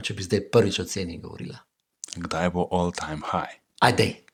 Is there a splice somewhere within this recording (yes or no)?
no